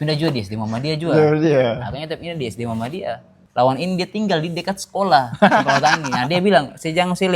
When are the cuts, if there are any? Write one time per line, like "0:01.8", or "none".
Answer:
0:03.4